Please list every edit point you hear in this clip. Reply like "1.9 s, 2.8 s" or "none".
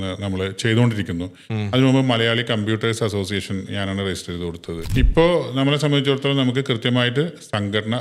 4.8 s